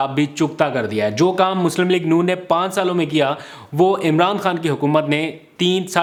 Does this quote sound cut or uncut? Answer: uncut